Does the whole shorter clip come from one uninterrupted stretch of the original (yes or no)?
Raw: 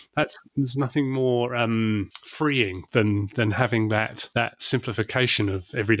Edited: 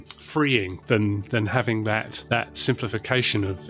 yes